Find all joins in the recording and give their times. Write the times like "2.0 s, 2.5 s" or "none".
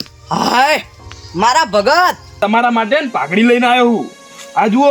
2.4 s